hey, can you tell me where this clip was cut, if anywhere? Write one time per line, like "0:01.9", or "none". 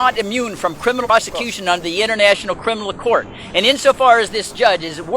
0:01.1